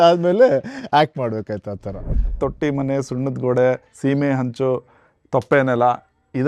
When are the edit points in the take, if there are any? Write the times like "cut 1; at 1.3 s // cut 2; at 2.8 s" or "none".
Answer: cut 1; at 2.4 s